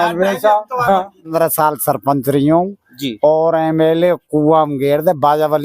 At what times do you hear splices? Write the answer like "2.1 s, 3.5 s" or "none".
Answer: 1.3 s